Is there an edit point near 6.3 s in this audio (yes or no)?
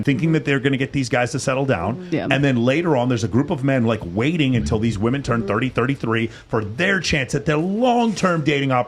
no